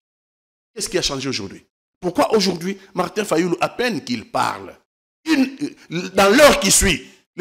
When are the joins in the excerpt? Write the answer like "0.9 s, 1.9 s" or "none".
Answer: none